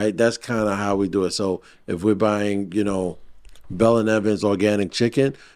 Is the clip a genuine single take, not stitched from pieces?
yes; 0 cuts

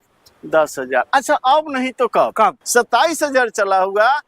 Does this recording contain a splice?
yes; 1 cut; at 2.6 s

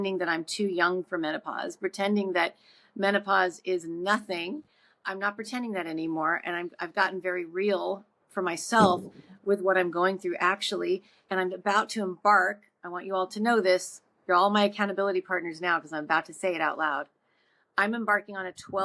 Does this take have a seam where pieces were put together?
no; 0 cuts

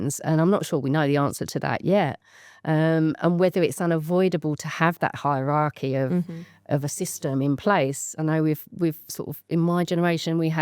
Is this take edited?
no; 0 cuts

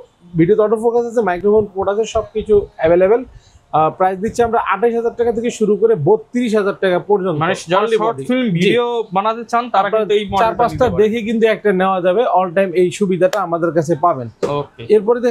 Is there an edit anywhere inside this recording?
no; 0 cuts

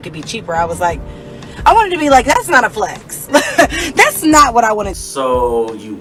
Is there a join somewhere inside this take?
no; 0 cuts

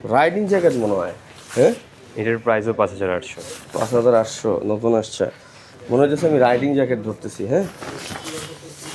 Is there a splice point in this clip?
no; 0 cuts

